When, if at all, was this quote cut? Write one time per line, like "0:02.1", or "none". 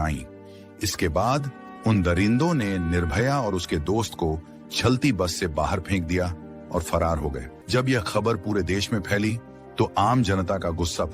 0:07.5

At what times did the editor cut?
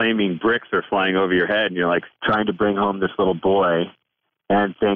0:02.1

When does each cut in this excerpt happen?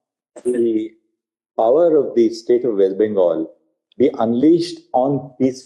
none

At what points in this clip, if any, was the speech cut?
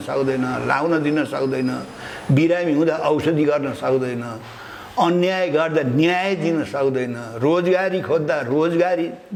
none

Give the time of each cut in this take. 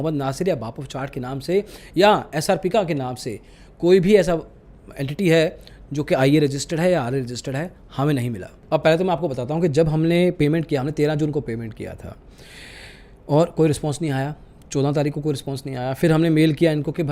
none

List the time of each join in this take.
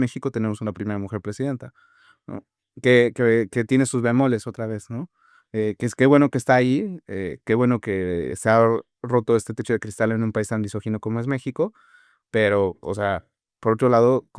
none

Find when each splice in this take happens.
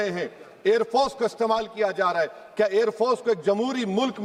none

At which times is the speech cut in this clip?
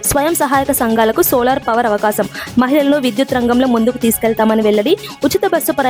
none

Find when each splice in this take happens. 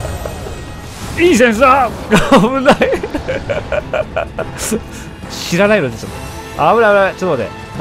0:01.0

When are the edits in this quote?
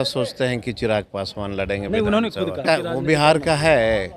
0:02.6

